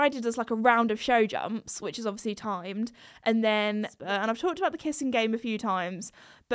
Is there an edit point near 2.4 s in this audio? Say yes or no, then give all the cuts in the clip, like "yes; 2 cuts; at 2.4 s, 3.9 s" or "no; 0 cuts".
no; 1 cut; at 3.9 s